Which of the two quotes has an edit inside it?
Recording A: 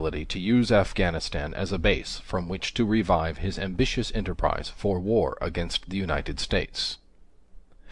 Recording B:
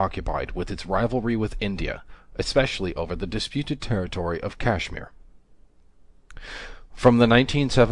A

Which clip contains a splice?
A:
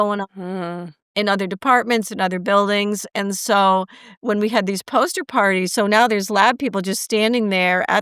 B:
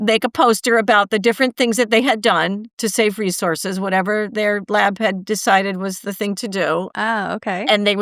B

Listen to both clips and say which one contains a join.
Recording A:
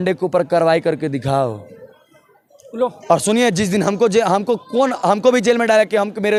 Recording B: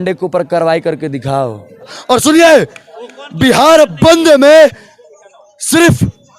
B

